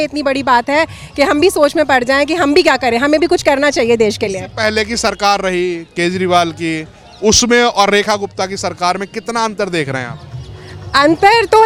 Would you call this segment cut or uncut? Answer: uncut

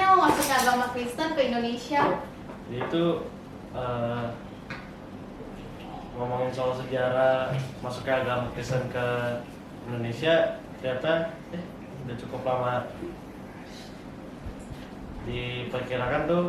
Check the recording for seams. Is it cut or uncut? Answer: uncut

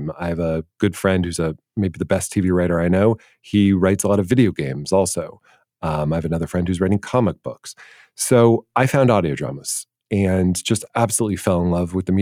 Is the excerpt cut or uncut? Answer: uncut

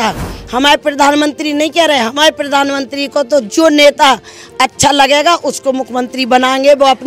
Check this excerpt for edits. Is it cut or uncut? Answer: uncut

